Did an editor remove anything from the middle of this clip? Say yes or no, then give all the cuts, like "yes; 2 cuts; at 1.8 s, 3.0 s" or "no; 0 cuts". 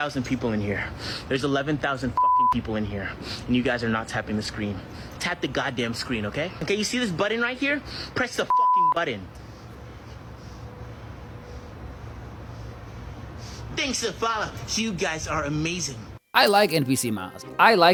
no; 0 cuts